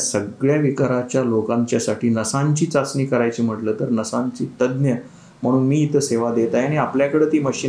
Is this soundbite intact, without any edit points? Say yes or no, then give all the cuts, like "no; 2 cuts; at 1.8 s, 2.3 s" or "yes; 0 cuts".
yes; 0 cuts